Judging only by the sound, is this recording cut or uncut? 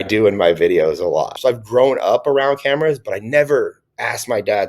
cut